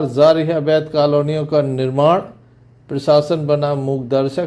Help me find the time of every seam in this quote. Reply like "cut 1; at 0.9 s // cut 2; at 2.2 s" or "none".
none